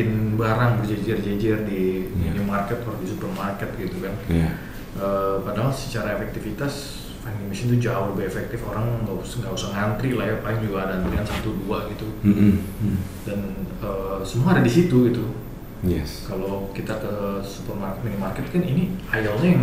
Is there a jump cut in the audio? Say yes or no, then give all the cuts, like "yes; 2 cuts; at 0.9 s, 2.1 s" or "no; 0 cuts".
no; 0 cuts